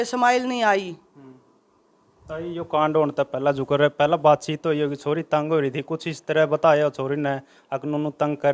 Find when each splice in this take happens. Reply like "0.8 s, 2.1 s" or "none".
none